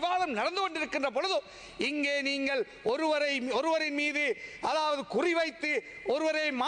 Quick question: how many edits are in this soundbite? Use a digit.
0